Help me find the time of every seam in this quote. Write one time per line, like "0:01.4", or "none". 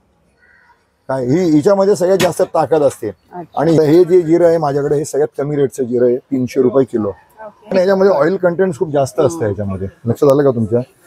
0:03.8
0:07.7